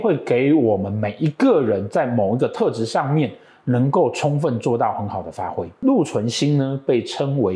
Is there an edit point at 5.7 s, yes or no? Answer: yes